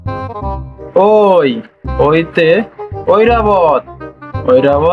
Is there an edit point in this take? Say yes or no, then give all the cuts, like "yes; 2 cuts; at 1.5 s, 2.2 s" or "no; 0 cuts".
yes; 1 cut; at 0.9 s